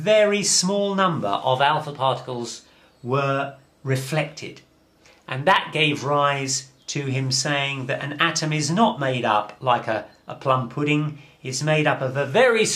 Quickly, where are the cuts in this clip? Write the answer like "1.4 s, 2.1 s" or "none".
3.2 s

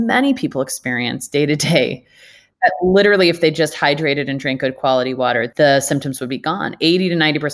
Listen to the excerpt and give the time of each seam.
5.5 s

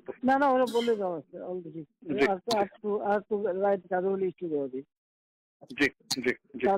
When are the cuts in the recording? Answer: none

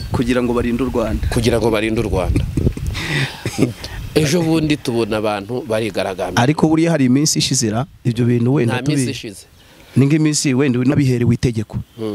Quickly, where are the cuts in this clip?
10.9 s

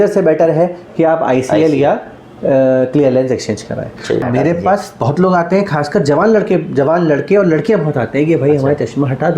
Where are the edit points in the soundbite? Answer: 4.2 s

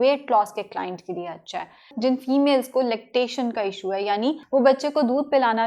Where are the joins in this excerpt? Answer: 1.9 s, 4.4 s

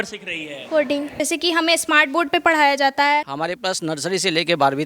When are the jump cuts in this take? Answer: 1.2 s, 3.3 s

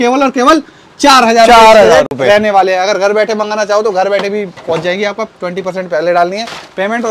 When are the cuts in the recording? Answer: none

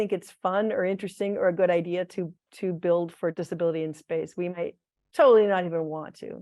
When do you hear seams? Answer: 3.3 s

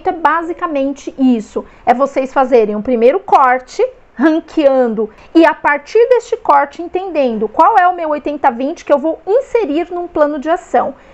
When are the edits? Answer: 5.1 s

